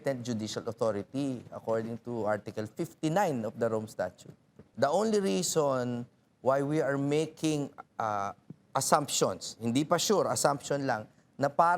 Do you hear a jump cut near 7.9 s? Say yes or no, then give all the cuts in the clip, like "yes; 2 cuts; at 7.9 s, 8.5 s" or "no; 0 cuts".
no; 1 cut; at 4.6 s